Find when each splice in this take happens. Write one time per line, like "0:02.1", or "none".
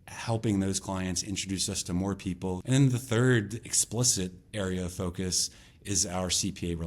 0:02.6

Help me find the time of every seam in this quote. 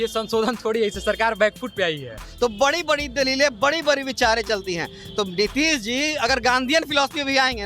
0:02.2

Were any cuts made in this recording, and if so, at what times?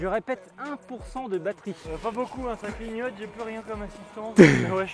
0:01.9

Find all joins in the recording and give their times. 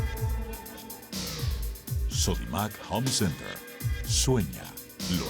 0:01.0

